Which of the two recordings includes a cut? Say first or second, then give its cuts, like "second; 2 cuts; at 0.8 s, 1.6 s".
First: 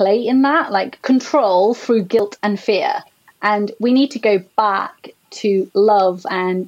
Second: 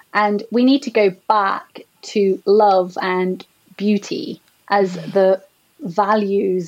first; 2 cuts; at 0.9 s, 2.2 s